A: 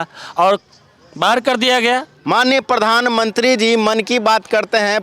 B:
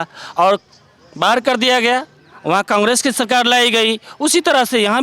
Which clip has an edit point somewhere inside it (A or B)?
A